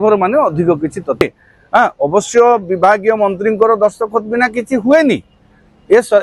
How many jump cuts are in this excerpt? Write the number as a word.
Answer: one